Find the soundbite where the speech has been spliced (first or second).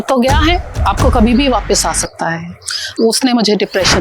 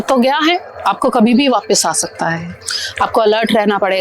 first